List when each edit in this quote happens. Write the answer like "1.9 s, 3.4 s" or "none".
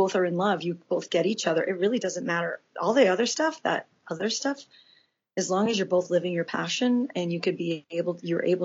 4.2 s

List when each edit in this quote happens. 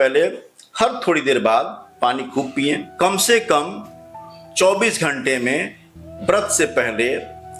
2.9 s

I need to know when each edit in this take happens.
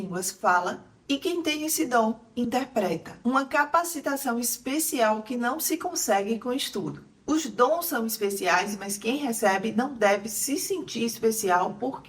3.1 s, 7.1 s

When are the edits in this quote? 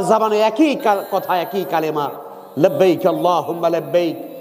none

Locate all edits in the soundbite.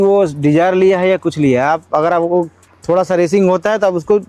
none

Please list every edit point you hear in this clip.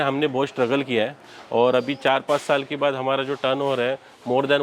none

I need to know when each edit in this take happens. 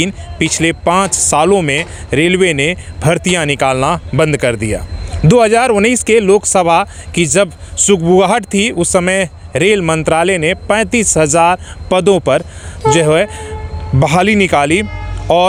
none

